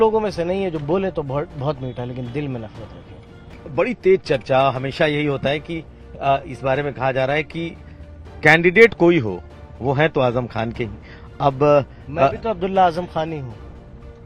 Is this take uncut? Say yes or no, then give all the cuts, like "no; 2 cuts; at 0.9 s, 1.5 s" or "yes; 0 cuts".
no; 1 cut; at 3.5 s